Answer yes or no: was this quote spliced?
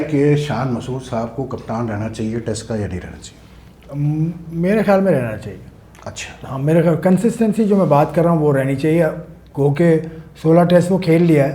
no